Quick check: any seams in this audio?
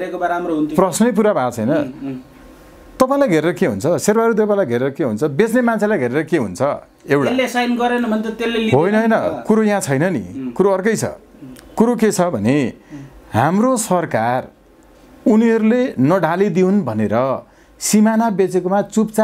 no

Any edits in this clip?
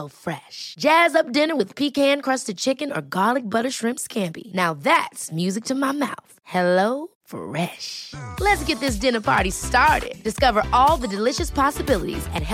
no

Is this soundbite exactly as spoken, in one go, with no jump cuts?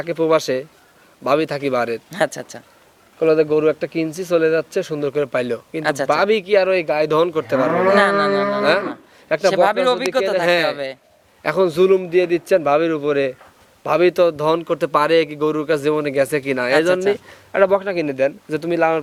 yes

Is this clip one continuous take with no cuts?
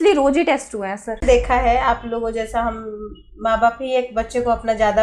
no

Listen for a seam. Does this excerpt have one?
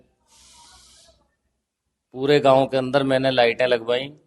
no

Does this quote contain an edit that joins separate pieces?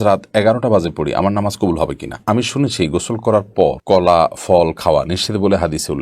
yes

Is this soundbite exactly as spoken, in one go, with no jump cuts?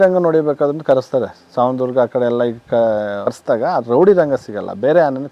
no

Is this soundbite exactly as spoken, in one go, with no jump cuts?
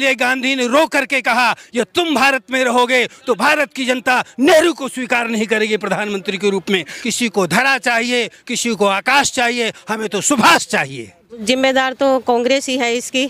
no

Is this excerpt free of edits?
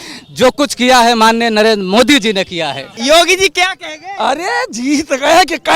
no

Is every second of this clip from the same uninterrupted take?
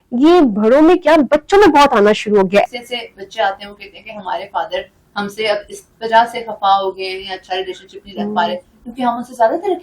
no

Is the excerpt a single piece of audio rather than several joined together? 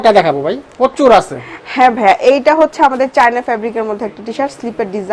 yes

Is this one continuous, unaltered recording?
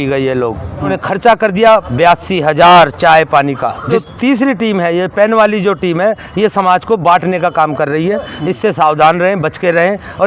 no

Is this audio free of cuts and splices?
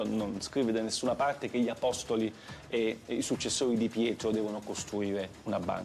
yes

